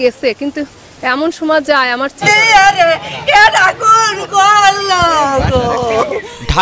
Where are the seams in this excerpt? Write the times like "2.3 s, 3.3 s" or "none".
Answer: 2.2 s